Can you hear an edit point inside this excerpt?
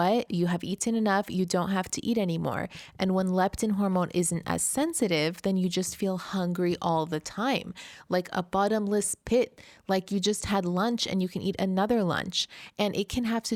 no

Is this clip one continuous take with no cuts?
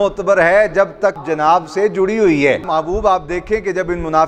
no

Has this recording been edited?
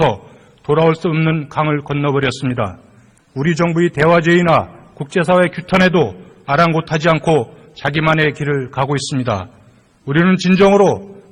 yes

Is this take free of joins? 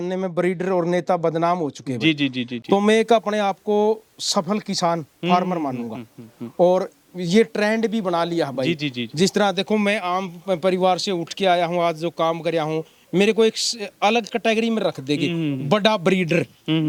yes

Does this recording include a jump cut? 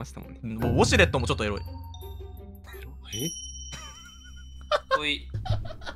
no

